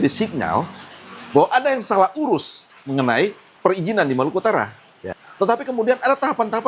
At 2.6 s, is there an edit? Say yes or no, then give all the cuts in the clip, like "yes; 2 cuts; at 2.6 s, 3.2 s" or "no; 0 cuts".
no; 1 cut; at 5.2 s